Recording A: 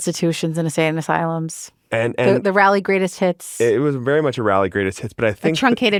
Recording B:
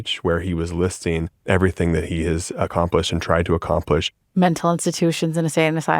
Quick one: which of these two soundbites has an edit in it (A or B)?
B